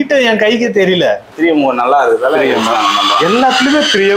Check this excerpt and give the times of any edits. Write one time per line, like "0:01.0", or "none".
0:01.2